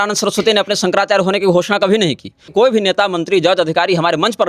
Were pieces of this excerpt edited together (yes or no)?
yes